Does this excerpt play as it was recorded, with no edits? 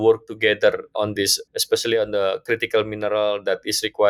yes; 0 cuts

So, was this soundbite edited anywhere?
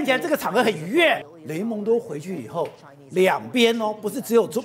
yes; 1 cut; at 1.2 s

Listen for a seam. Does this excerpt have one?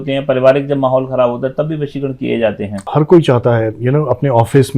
yes; 1 cut; at 2.9 s

